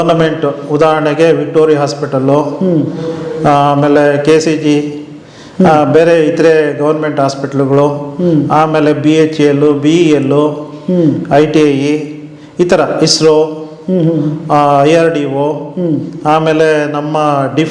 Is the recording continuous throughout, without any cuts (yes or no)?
yes